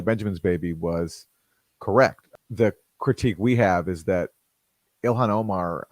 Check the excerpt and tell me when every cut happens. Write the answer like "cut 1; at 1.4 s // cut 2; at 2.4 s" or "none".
cut 1; at 2.2 s